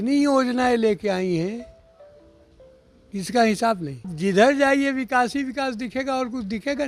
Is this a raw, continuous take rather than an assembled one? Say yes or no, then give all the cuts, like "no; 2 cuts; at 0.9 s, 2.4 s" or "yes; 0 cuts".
no; 1 cut; at 4.1 s